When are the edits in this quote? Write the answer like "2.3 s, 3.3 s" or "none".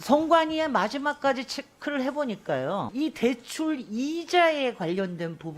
2.9 s